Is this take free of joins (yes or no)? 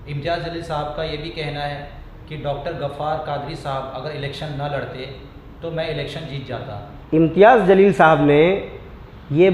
no